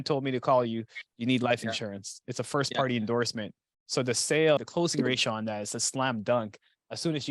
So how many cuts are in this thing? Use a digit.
1